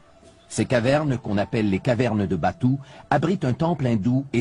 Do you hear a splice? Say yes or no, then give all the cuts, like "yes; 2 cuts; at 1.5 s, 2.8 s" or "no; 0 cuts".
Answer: no; 0 cuts